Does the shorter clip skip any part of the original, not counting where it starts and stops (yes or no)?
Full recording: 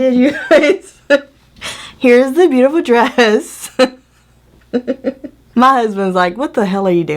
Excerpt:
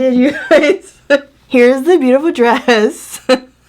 yes